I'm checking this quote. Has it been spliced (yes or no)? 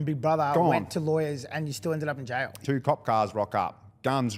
yes